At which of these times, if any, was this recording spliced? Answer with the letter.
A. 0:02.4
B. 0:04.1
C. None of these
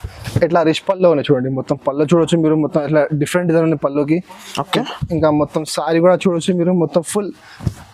C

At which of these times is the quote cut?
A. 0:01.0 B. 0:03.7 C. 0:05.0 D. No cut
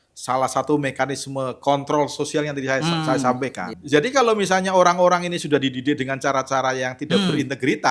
B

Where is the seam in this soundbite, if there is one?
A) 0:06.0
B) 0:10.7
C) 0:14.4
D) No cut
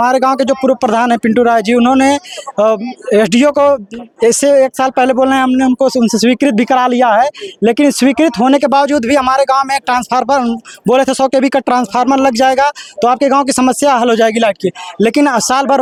D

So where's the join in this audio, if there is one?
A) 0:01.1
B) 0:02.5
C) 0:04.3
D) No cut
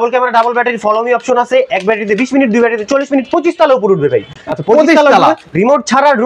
D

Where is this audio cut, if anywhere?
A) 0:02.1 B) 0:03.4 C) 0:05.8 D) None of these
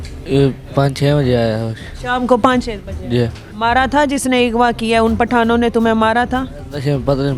B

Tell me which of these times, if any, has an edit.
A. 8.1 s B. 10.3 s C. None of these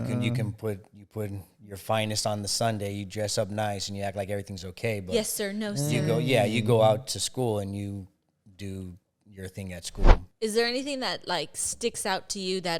B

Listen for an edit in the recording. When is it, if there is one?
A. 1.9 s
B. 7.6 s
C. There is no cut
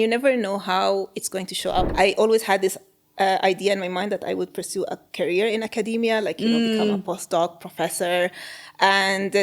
A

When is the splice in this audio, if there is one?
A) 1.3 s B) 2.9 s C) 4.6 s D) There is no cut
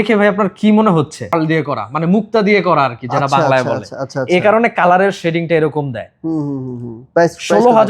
A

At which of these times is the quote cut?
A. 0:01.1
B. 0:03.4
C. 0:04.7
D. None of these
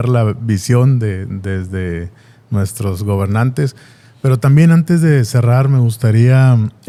D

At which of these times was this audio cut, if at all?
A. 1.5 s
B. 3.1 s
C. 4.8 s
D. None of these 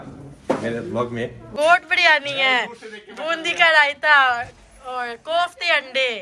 A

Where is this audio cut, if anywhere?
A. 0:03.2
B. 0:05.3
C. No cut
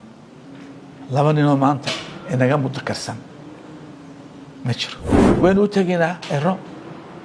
B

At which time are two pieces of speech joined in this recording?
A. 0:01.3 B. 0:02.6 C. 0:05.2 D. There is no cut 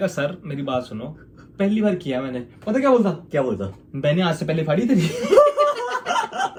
D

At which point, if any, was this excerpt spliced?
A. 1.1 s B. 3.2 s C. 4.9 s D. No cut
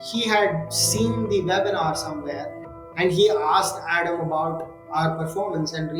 D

